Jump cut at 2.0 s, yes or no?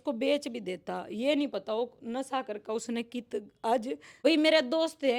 no